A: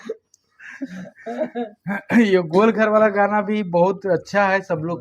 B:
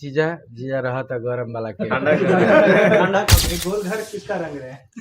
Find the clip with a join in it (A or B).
B